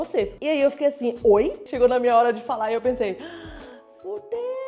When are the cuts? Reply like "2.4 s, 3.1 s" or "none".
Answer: 1.6 s